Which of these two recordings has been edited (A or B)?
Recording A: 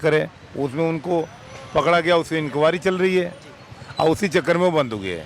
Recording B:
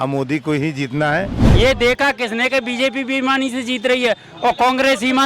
B